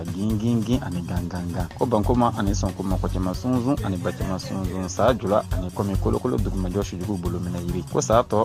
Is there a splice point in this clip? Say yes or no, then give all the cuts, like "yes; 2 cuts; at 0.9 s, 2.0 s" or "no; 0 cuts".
no; 0 cuts